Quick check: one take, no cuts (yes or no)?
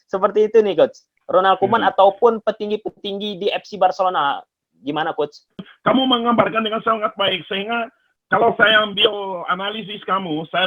no